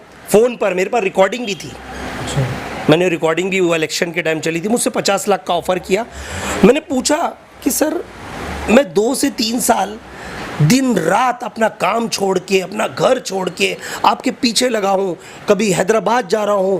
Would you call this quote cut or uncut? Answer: uncut